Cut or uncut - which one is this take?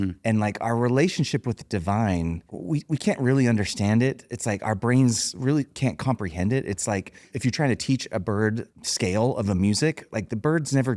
cut